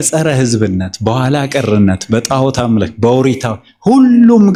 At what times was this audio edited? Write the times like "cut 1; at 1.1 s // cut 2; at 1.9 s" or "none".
none